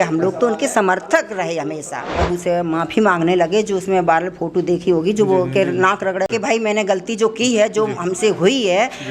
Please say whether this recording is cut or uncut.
cut